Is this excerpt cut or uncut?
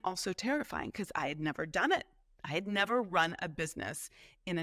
uncut